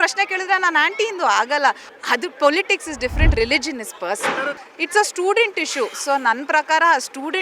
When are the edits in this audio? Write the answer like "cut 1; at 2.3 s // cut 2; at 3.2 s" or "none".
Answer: cut 1; at 1.8 s // cut 2; at 4.7 s